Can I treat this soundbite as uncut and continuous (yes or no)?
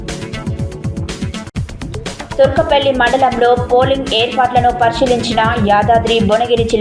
yes